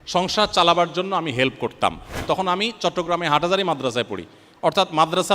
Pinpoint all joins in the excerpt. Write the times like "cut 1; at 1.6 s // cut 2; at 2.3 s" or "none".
cut 1; at 2.2 s